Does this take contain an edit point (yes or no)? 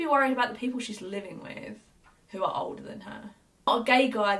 no